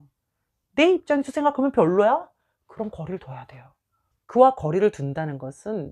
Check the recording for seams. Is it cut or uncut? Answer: cut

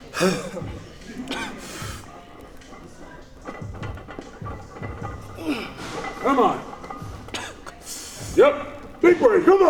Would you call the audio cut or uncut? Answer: uncut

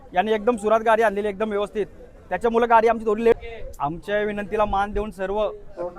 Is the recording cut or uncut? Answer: cut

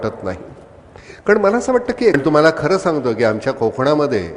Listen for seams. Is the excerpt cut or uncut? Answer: cut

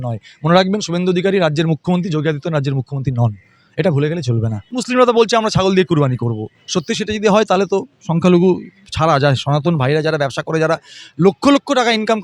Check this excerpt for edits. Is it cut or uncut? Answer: cut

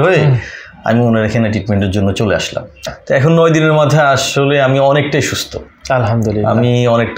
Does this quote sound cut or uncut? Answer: cut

